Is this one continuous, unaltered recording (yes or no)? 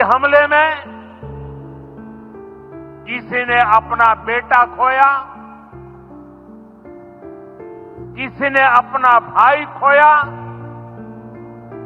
no